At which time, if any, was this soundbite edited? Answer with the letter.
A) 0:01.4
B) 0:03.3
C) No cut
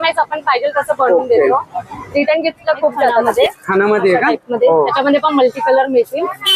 B